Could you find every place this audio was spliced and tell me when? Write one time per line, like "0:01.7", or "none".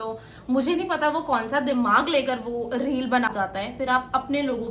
0:03.3